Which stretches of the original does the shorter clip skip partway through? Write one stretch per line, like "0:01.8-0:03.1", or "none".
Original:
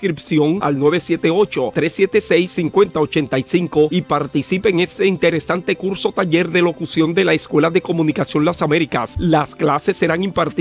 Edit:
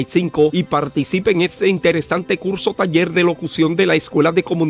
none